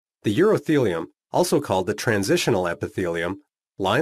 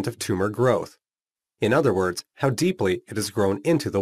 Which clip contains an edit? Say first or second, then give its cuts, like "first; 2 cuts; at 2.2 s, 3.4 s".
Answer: second; 1 cut; at 1.7 s